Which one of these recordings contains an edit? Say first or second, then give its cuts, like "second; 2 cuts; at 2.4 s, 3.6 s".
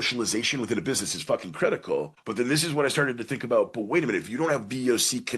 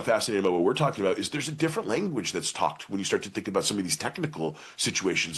first; 1 cut; at 2.2 s